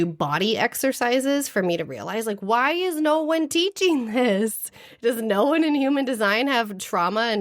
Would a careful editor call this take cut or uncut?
uncut